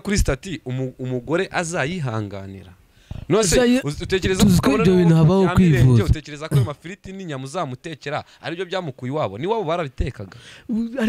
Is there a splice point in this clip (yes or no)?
no